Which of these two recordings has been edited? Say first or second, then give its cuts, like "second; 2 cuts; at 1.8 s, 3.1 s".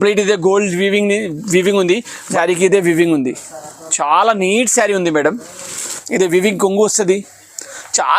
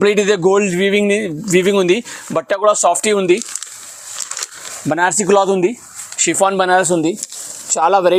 first; 2 cuts; at 2.3 s, 6.0 s